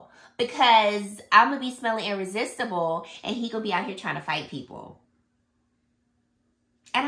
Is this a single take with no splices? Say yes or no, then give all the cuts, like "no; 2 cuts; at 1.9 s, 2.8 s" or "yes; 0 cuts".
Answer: yes; 0 cuts